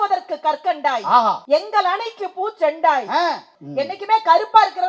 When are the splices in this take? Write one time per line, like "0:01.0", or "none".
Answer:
0:01.4
0:03.5